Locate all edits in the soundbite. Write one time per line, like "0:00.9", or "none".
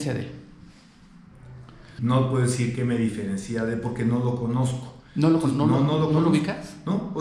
0:01.8